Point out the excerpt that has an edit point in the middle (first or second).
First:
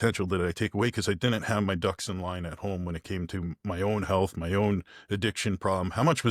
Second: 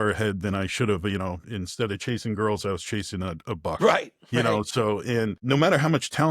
second